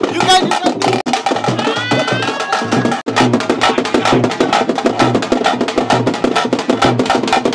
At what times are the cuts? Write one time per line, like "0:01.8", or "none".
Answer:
0:01.0
0:03.1